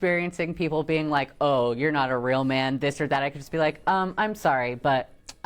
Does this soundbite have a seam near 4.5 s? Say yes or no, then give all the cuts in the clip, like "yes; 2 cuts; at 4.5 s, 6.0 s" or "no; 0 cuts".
no; 0 cuts